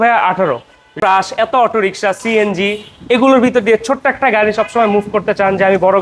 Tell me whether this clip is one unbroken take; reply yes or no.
no